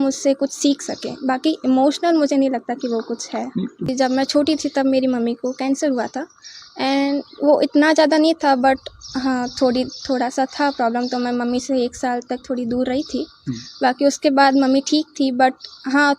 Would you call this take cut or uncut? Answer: cut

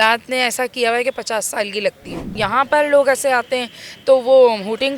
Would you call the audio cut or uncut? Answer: cut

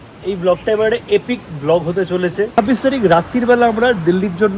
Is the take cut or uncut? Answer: cut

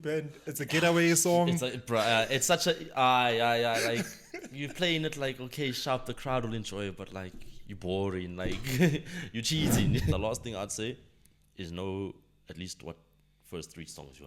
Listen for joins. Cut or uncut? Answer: cut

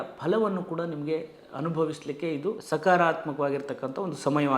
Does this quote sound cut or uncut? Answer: cut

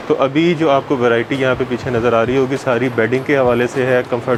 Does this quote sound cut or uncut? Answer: uncut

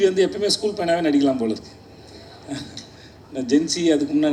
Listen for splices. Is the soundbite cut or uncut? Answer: uncut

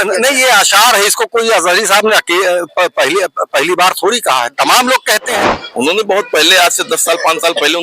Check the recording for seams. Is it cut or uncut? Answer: cut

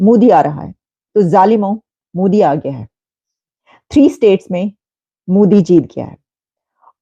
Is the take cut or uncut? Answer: uncut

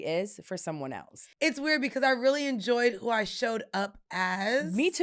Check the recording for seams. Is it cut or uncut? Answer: cut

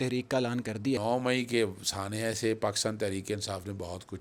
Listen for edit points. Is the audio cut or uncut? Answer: cut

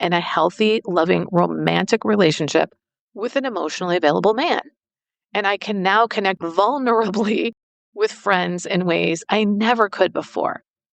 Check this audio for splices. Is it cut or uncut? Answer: cut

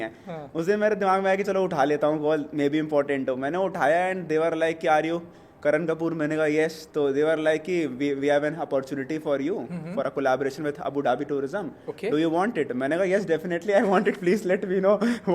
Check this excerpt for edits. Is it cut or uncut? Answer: uncut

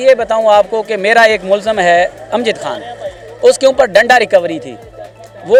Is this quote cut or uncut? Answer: uncut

